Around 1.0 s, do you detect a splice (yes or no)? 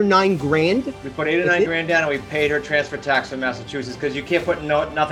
yes